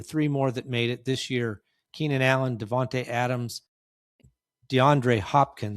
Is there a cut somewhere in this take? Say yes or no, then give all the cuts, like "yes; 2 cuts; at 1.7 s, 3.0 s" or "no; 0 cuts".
yes; 1 cut; at 4.1 s